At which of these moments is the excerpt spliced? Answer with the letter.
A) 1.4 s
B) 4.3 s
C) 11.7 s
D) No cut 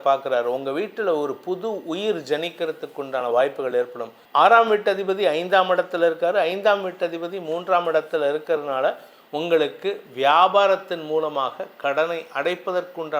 B